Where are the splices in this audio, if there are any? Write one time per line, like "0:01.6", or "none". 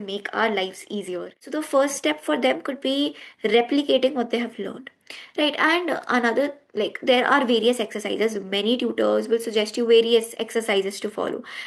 0:01.5